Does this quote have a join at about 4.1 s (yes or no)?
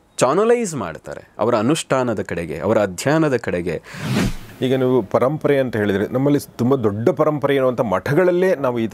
yes